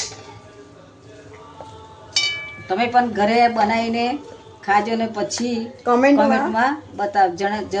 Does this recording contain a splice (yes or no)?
no